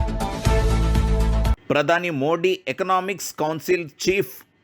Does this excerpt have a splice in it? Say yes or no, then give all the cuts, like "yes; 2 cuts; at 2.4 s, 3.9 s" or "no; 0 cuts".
yes; 1 cut; at 1.5 s